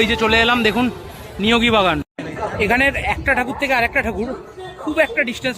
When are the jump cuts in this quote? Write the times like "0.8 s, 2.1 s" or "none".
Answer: 2.2 s